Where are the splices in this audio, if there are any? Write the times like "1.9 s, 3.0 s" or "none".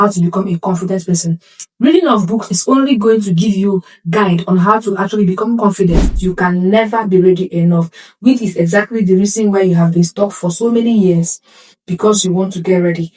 6.1 s